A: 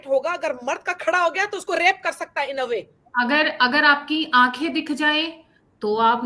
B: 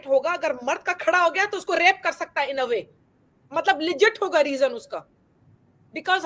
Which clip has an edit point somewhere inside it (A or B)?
A